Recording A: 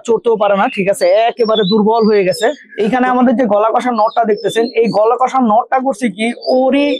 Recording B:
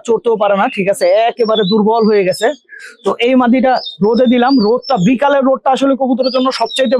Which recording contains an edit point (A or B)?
A